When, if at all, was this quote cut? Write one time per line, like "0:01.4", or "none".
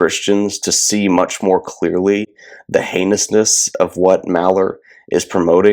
none